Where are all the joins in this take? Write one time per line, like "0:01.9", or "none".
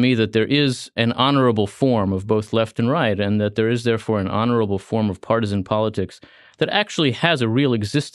0:00.9